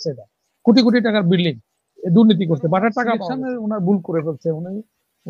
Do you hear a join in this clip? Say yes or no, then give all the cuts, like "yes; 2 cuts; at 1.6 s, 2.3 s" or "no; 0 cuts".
yes; 1 cut; at 3.3 s